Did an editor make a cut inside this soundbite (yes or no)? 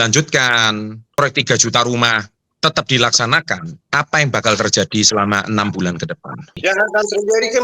yes